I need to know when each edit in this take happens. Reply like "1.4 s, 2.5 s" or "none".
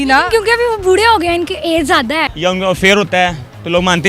2.3 s